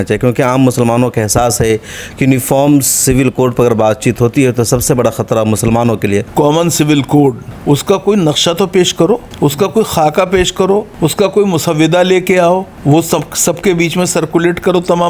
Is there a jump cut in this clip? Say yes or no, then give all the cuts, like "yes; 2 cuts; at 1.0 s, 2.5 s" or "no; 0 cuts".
yes; 5 cuts; at 6.3 s, 7.5 s, 9.3 s, 10.9 s, 12.7 s